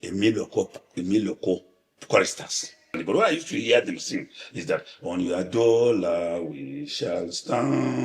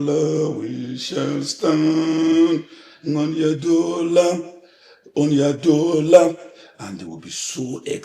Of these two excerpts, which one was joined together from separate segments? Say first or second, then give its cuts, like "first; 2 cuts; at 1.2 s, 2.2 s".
first; 1 cut; at 2.9 s